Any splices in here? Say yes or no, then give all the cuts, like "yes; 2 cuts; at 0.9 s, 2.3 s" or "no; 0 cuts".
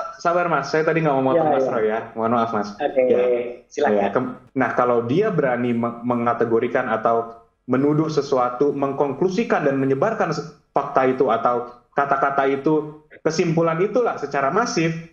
yes; 1 cut; at 4.4 s